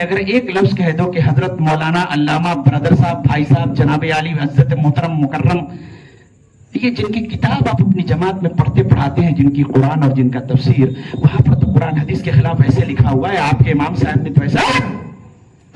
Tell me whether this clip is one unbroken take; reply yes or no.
yes